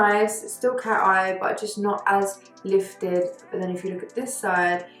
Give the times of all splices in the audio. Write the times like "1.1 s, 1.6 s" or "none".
3.4 s